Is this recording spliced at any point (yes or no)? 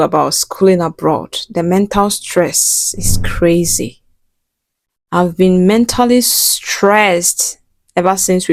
no